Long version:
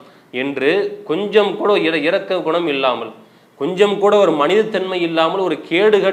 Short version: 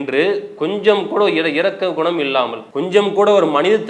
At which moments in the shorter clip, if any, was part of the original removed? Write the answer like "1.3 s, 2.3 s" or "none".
2.6 s